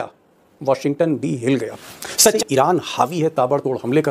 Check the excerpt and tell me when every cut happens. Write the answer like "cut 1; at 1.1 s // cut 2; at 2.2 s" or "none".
cut 1; at 2.4 s